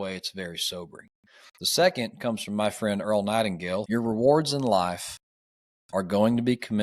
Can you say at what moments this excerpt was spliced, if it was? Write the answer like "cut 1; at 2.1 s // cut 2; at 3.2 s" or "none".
cut 1; at 3.8 s